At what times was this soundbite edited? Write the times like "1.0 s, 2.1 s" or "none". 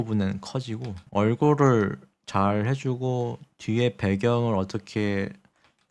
1.0 s